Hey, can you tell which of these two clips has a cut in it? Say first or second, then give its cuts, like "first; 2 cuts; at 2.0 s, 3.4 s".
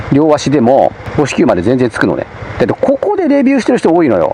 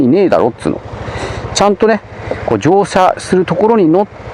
first; 1 cut; at 1.0 s